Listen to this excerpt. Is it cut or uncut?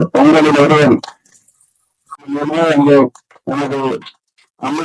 cut